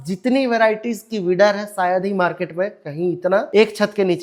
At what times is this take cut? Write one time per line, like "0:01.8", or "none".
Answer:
none